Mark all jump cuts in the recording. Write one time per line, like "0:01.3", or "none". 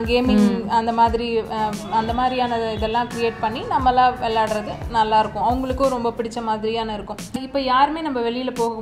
0:07.3